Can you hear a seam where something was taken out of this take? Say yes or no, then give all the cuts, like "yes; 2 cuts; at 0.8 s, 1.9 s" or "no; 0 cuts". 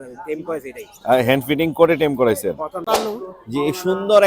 yes; 1 cut; at 2.8 s